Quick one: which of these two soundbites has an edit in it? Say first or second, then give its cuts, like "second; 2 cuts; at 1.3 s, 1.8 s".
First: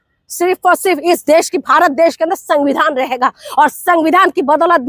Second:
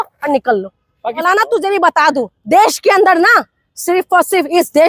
second; 1 cut; at 1.2 s